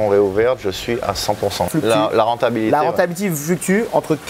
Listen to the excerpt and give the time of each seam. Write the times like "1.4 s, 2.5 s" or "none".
1.7 s

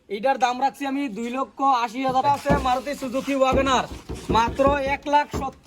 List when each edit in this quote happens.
2.2 s

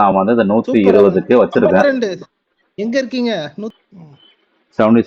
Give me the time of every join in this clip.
3.7 s

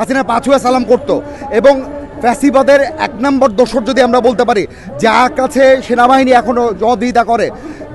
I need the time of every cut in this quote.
none

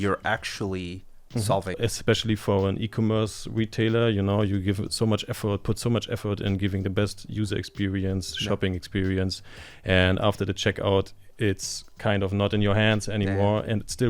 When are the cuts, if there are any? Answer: 1.8 s

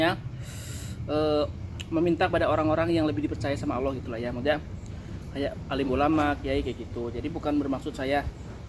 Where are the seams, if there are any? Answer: none

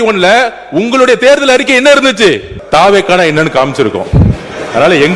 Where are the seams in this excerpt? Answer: 2.5 s

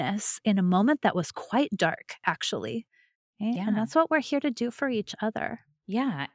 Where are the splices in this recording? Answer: 3.2 s

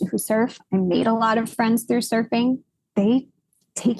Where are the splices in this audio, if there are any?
2.8 s

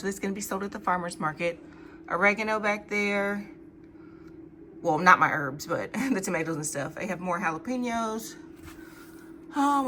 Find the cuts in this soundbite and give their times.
none

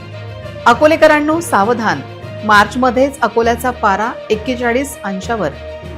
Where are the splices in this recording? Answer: none

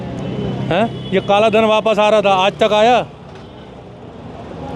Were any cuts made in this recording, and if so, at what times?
none

